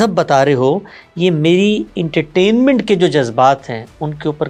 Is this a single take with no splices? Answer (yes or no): yes